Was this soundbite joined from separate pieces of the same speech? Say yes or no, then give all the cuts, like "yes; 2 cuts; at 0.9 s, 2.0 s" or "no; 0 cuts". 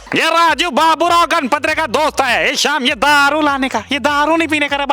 no; 0 cuts